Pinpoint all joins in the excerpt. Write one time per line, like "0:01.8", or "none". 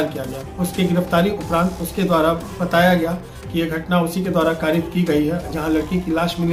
none